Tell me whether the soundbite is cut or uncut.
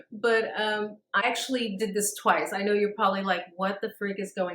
cut